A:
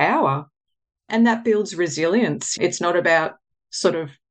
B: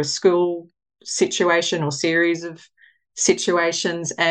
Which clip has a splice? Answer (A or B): A